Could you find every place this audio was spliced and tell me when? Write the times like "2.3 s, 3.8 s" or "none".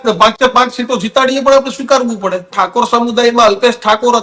2.5 s